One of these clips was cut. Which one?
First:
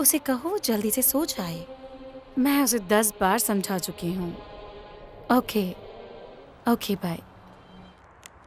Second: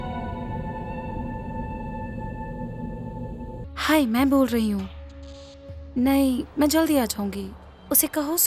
second; 1 cut; at 3.6 s

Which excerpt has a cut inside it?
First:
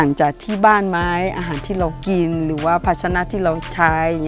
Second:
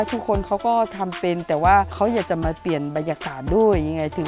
second; 1 cut; at 1.9 s

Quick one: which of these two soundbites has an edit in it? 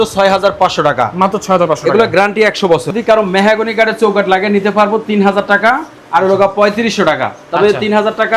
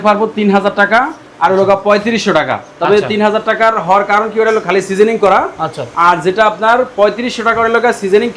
first; 1 cut; at 2.9 s

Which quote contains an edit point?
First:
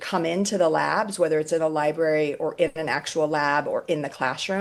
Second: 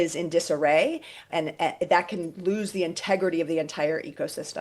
second; 1 cut; at 1.3 s

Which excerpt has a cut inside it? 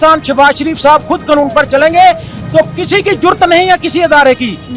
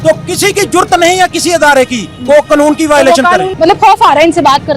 second; 1 cut; at 3.5 s

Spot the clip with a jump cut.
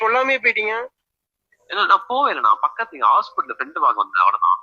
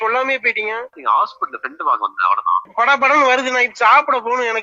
second; 2 cuts; at 0.9 s, 2.7 s

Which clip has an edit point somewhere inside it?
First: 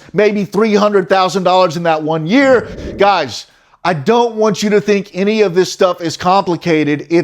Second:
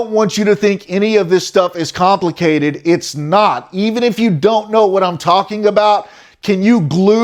first; 1 cut; at 2.8 s

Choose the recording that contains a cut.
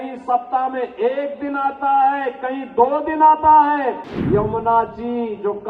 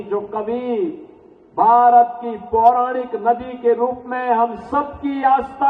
first; 1 cut; at 4.1 s

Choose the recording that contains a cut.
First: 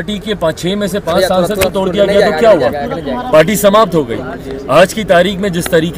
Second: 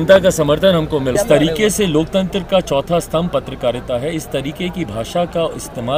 second; 1 cut; at 1.1 s

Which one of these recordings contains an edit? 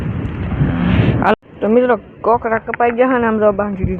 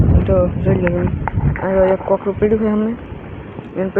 first; 1 cut; at 1.3 s

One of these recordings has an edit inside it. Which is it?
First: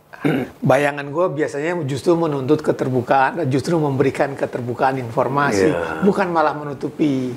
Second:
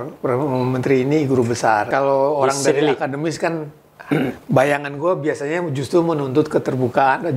second; 1 cut; at 1.9 s

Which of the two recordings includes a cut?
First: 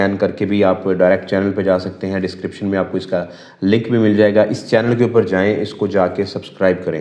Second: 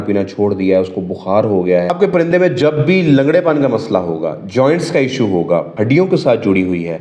second; 2 cuts; at 1.9 s, 5.7 s

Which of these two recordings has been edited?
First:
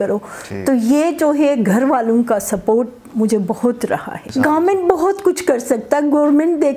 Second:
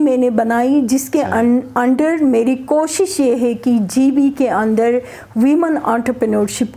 first; 1 cut; at 4.2 s

